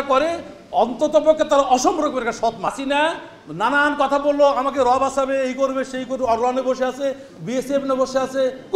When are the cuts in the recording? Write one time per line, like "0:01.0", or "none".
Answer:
0:02.8